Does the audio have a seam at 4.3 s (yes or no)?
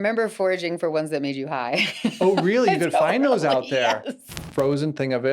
yes